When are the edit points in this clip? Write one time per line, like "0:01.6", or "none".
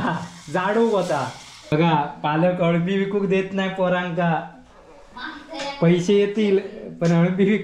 0:01.7